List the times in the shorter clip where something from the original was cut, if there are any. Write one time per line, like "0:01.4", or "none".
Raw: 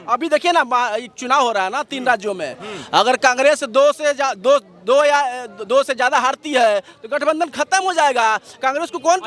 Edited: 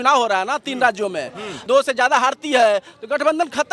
0:01.5